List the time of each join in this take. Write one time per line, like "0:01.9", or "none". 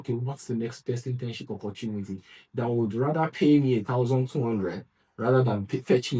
none